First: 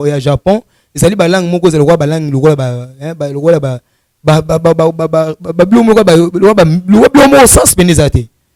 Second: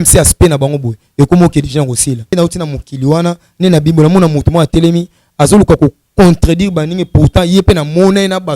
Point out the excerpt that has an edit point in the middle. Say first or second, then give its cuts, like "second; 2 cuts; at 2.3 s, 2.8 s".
second; 1 cut; at 2.3 s